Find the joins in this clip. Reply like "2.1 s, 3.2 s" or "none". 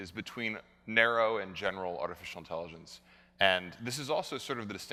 none